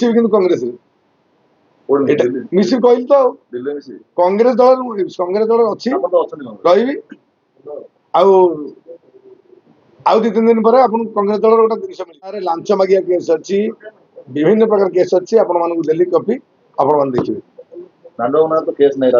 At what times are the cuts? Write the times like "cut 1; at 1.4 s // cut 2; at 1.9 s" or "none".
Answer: cut 1; at 12.5 s